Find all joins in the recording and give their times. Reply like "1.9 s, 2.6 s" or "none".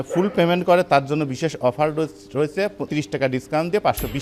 2.9 s